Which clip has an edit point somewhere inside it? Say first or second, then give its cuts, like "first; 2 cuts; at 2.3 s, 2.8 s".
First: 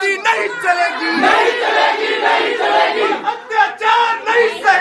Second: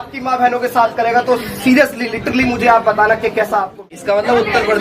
second; 1 cut; at 3.9 s